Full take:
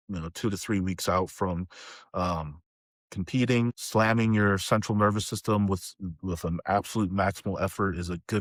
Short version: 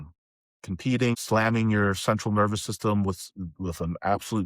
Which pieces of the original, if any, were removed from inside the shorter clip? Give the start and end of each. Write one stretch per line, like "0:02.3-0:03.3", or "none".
0:03.6-0:03.8

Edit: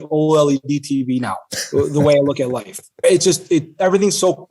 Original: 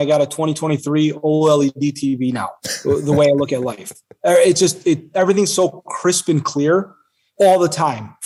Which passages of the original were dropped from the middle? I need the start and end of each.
0:04.2-0:04.4

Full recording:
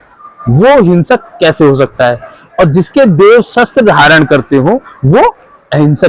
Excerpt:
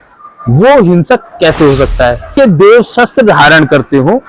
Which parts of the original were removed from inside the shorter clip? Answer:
0:02.3-0:02.9

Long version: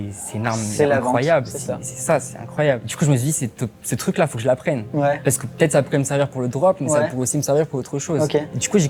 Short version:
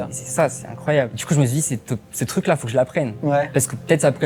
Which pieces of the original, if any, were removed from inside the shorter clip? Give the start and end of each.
none

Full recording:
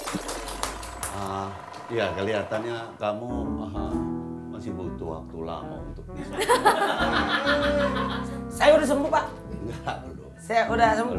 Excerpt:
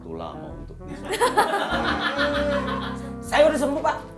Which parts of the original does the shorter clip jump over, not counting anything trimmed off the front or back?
none

